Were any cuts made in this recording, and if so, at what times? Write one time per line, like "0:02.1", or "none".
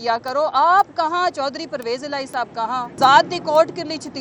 0:02.9